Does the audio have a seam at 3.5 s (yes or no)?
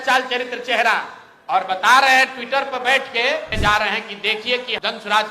yes